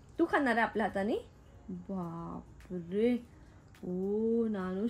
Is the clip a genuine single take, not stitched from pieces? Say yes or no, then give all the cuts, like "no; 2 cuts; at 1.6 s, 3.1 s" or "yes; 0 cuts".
yes; 0 cuts